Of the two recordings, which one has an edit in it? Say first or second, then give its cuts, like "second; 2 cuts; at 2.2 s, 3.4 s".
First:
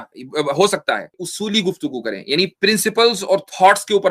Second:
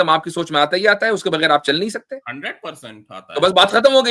first; 1 cut; at 1.3 s